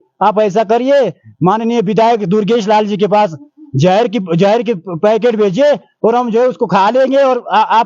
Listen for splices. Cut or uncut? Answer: uncut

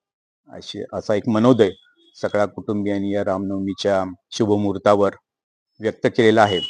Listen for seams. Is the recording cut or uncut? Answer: uncut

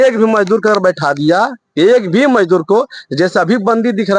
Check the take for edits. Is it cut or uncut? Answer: uncut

